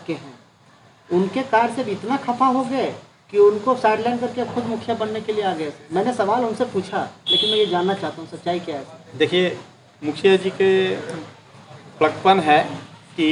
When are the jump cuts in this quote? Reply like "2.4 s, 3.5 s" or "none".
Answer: none